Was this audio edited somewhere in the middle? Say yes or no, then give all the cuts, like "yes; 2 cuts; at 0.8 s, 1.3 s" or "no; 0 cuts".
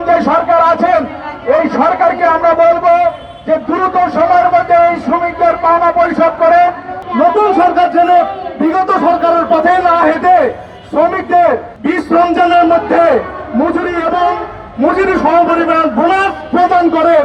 yes; 2 cuts; at 7.0 s, 11.7 s